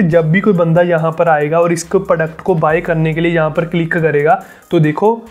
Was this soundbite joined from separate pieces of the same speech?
no; 0 cuts

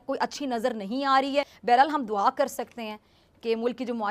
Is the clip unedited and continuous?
yes; 0 cuts

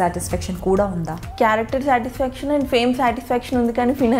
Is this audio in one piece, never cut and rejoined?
no; 1 cut; at 1.2 s

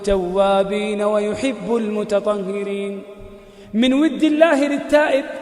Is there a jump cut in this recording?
no; 0 cuts

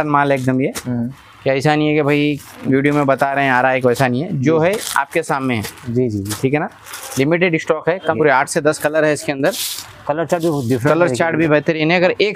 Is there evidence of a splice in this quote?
yes; 1 cut; at 8.2 s

